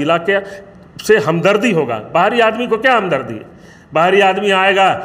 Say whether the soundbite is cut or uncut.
uncut